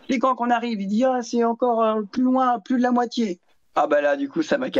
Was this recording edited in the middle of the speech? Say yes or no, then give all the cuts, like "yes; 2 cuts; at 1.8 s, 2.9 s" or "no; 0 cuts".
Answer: no; 0 cuts